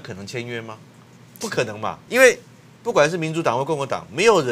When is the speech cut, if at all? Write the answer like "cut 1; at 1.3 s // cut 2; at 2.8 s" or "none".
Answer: cut 1; at 2.0 s

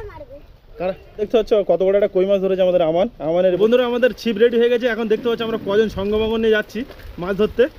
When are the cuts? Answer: cut 1; at 1.3 s // cut 2; at 3.6 s

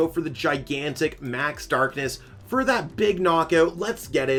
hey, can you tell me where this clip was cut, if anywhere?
none

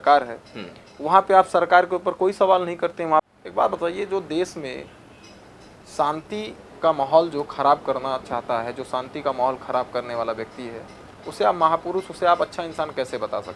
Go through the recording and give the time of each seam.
cut 1; at 3.2 s

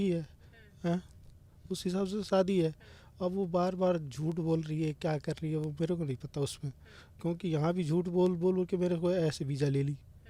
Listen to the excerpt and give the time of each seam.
none

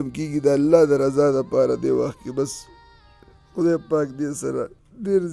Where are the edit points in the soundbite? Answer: none

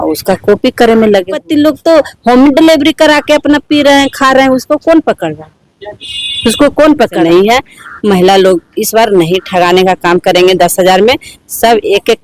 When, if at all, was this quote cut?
cut 1; at 1.4 s // cut 2; at 7.2 s

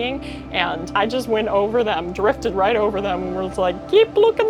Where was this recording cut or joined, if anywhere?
cut 1; at 0.9 s

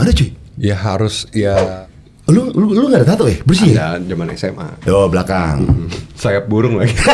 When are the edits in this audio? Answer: cut 1; at 1.7 s

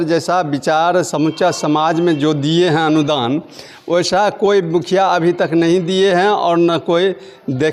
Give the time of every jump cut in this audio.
none

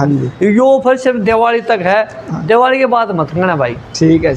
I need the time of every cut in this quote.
none

